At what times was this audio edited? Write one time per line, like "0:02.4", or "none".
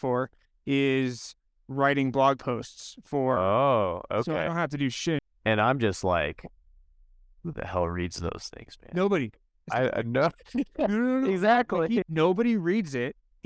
0:05.2
0:12.0

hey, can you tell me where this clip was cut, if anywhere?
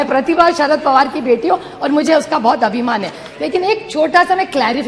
none

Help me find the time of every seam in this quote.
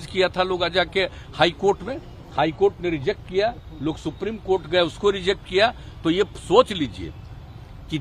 none

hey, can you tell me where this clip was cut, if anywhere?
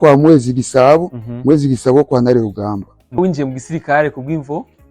0:03.2

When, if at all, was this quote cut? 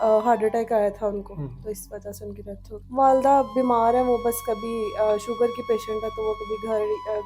0:02.8

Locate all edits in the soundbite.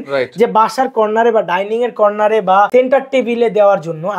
0:02.7

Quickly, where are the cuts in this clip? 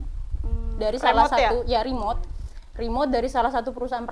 none

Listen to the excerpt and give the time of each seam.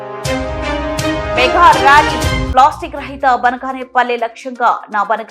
0:01.4

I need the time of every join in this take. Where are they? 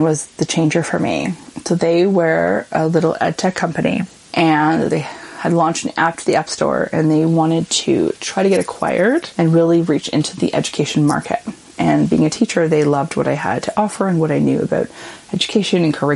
0:04.9
0:09.3

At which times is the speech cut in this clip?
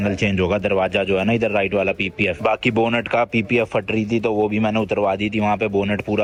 none

